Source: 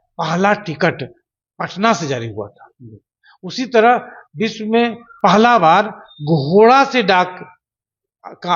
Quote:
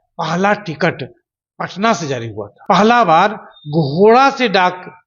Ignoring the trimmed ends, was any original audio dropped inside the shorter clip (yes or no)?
yes